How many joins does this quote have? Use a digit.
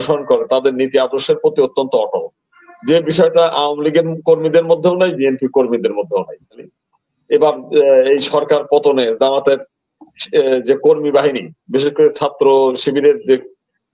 1